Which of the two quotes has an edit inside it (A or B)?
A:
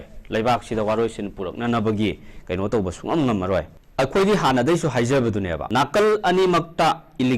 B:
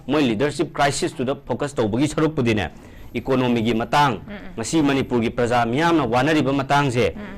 A